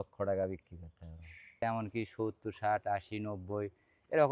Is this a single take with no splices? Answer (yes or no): no